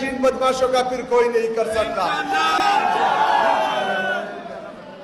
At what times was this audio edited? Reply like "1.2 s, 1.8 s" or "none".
none